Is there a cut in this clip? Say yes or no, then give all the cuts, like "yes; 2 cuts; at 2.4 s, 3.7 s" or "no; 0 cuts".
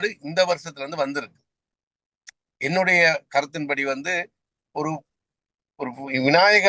no; 0 cuts